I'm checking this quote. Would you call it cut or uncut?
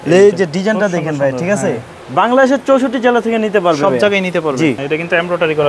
cut